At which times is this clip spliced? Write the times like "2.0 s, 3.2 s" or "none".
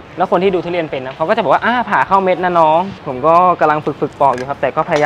3.0 s